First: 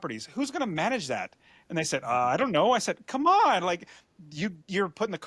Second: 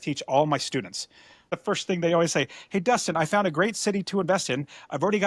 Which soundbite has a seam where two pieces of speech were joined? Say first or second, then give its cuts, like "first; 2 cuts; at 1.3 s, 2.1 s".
second; 1 cut; at 1.5 s